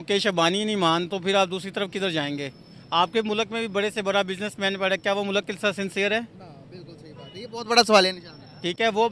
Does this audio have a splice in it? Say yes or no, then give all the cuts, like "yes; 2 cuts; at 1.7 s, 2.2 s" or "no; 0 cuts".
no; 0 cuts